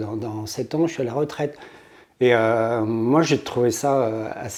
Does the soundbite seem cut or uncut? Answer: uncut